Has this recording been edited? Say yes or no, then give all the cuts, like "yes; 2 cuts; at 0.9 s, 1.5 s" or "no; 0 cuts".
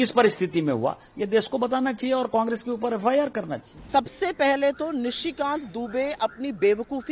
yes; 1 cut; at 3.8 s